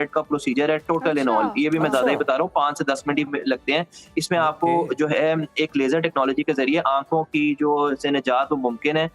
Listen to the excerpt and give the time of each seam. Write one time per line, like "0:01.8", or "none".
none